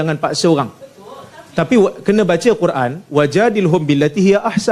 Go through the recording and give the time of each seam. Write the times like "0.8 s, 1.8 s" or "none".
none